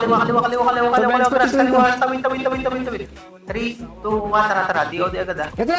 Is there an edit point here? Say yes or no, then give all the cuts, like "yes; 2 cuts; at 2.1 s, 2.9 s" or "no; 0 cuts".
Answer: no; 0 cuts